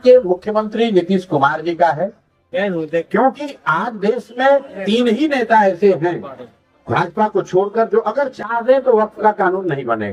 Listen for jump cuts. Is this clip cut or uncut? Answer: uncut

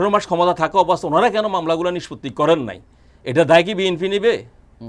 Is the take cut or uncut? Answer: uncut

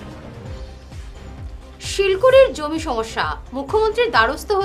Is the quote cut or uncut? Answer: uncut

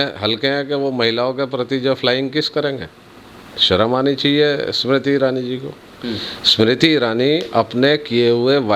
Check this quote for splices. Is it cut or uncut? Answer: uncut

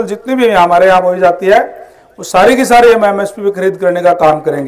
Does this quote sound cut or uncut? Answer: uncut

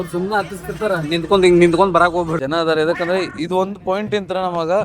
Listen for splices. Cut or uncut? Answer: cut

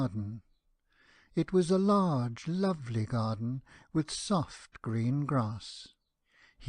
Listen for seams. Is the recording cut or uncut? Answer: cut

